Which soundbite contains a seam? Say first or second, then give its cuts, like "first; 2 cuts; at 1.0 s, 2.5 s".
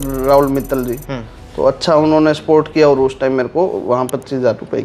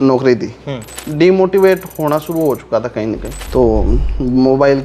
second; 2 cuts; at 0.9 s, 3.4 s